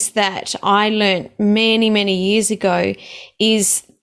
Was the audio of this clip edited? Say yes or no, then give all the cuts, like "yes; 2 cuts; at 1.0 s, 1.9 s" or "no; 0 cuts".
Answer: no; 0 cuts